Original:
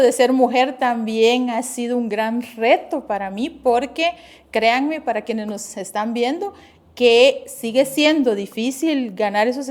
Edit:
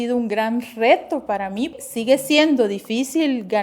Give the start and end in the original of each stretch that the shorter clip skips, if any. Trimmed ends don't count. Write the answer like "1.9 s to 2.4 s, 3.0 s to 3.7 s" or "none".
3.6 s to 7.4 s